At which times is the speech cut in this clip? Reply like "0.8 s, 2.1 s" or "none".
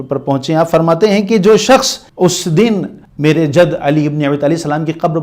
2.0 s, 3.0 s